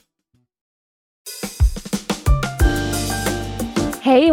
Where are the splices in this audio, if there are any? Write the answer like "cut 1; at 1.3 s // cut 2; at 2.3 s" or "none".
cut 1; at 1.2 s